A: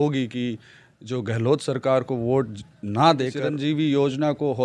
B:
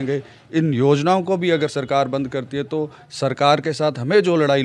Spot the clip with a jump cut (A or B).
A